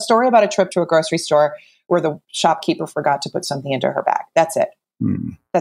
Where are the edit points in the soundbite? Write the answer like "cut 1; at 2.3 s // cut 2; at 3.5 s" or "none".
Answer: cut 1; at 2.3 s